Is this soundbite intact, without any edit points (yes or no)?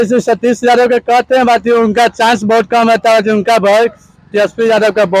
yes